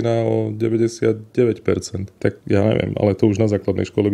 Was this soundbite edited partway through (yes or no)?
yes